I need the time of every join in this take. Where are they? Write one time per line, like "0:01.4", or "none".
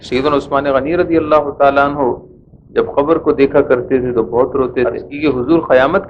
0:05.1